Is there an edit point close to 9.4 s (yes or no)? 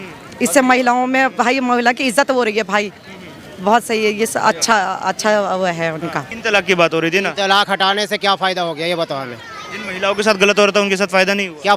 no